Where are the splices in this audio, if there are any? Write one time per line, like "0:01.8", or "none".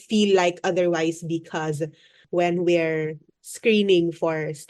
0:02.1

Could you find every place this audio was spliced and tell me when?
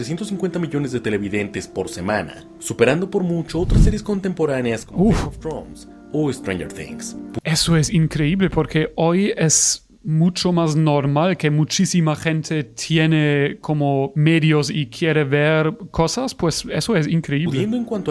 none

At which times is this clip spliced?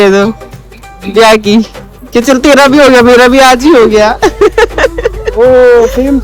none

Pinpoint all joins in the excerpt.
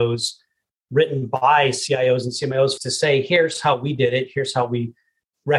0:02.8

